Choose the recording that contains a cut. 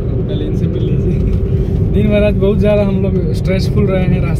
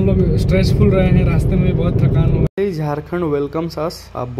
second; 1 cut; at 2.5 s

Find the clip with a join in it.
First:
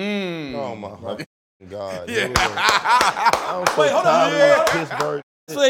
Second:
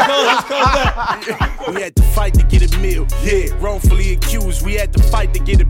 second; 1 cut; at 1.5 s

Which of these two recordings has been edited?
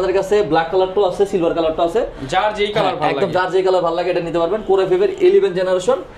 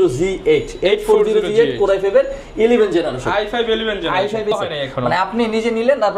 second; 1 cut; at 4.5 s

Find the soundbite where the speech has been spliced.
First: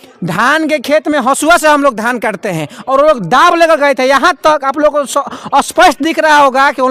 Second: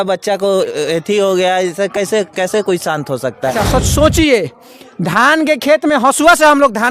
second; 1 cut; at 3.3 s

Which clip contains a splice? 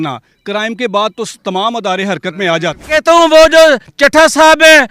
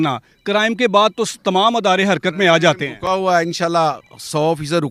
first; 1 cut; at 2.9 s

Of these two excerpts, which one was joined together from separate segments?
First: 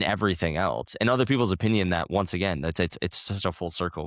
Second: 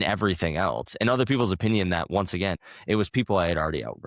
second; 1 cut; at 2.6 s

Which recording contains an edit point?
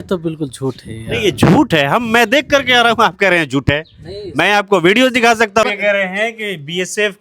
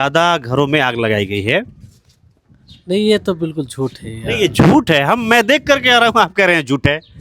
first; 1 cut; at 5.6 s

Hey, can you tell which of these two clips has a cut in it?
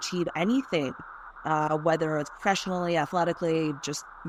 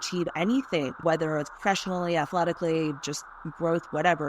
second; 1 cut; at 1.0 s

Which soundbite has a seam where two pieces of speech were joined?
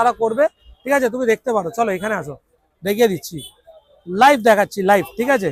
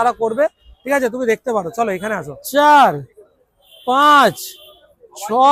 second; 1 cut; at 2.3 s

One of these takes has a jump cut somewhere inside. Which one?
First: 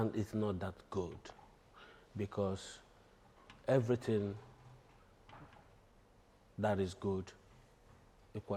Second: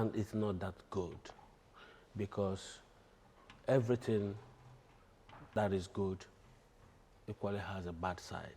second; 1 cut; at 5.5 s

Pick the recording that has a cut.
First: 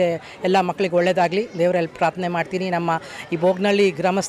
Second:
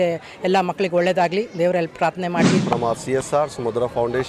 second; 1 cut; at 2.5 s

